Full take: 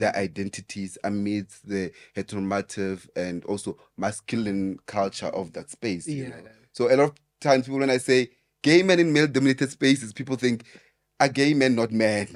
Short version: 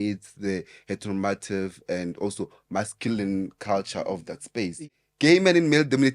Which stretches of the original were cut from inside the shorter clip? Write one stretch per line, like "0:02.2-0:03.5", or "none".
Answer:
0:06.3-0:08.4